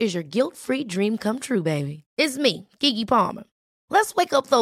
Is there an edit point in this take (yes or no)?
no